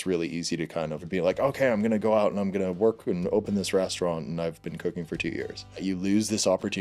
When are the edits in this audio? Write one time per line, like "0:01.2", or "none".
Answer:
0:01.0
0:05.8